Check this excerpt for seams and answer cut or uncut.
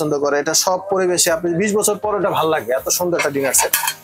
uncut